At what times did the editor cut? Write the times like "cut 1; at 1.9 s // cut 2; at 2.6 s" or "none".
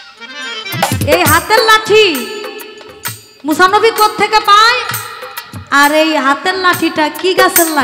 none